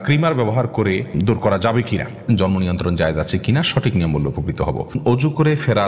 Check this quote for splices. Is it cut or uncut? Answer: cut